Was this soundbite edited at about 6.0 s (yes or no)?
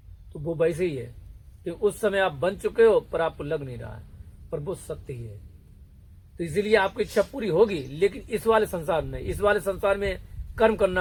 no